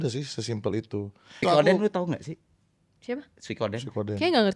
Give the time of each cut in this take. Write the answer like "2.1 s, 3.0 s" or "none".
1.4 s